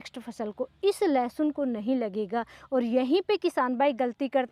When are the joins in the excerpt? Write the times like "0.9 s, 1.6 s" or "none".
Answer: none

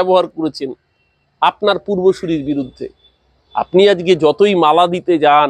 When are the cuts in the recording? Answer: none

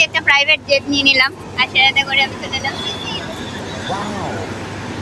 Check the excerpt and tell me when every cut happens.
none

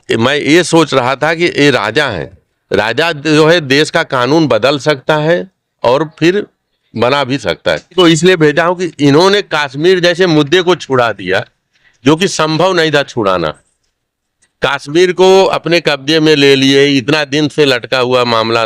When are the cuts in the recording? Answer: 7.9 s

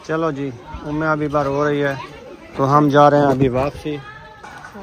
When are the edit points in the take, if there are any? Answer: none

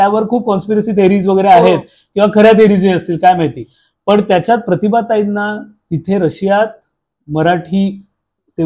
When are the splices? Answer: none

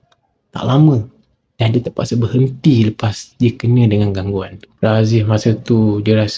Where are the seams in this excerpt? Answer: 4.7 s

